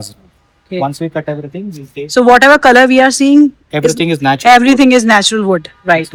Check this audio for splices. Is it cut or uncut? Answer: uncut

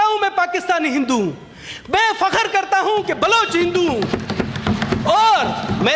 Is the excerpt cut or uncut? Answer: uncut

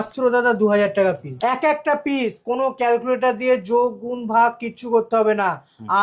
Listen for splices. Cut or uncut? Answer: cut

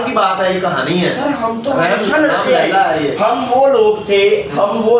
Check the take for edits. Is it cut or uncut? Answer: uncut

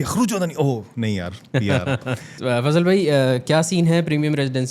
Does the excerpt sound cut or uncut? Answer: cut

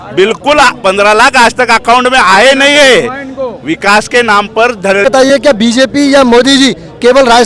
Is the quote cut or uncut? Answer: cut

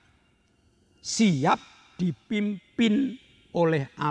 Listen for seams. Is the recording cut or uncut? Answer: uncut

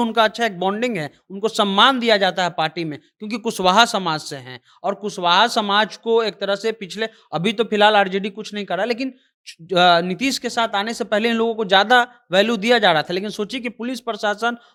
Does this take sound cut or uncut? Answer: uncut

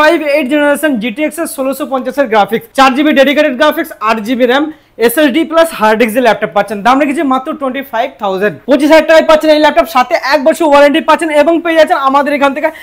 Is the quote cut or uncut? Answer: uncut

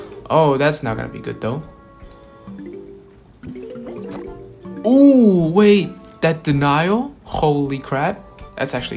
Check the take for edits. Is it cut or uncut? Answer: uncut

